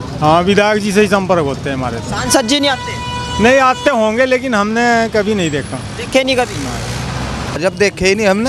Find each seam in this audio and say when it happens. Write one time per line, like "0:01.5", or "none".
0:07.5